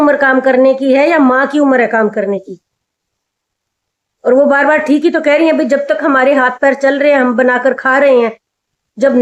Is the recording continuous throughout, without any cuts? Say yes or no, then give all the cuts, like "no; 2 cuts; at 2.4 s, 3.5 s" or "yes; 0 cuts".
yes; 0 cuts